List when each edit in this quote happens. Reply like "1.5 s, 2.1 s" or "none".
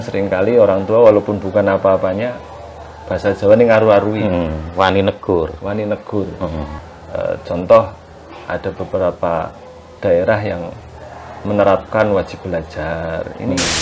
6.8 s